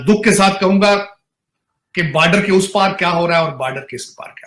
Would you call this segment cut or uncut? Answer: uncut